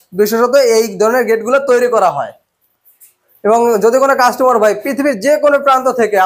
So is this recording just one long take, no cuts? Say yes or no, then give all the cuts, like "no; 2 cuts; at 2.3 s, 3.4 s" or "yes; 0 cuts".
yes; 0 cuts